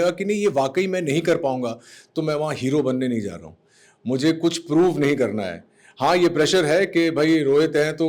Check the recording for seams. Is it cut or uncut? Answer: uncut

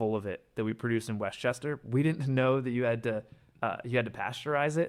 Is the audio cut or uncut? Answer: uncut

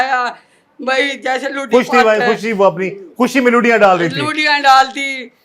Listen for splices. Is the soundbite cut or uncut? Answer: uncut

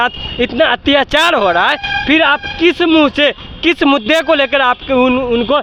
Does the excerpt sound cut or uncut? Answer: uncut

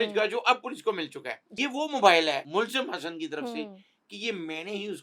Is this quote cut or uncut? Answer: cut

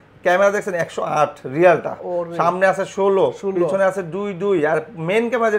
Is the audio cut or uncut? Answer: uncut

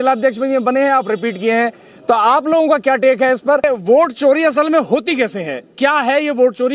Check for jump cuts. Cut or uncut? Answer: cut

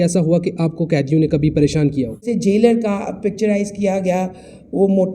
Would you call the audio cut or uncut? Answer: cut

